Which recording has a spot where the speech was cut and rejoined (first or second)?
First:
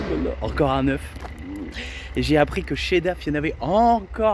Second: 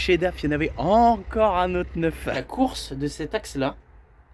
second